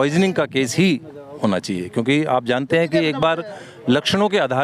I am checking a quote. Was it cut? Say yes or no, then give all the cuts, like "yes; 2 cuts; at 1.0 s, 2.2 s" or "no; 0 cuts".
no; 0 cuts